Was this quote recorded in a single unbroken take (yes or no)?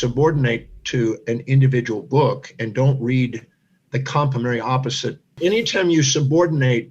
no